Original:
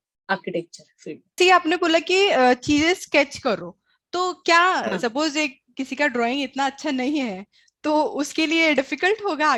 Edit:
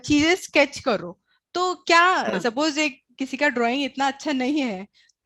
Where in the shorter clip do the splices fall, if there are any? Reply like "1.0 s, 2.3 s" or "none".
none